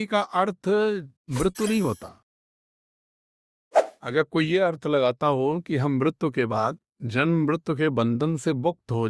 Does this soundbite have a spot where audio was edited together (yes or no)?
no